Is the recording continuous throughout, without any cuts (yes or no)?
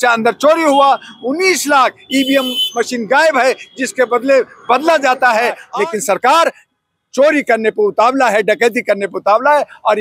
no